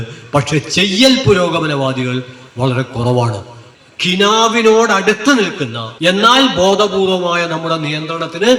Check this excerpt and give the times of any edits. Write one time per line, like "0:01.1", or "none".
0:03.7